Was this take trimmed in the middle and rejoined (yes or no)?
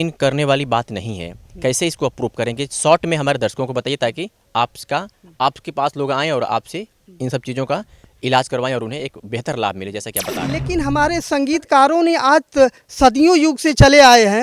yes